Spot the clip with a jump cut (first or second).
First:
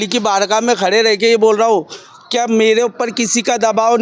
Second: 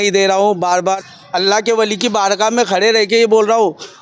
second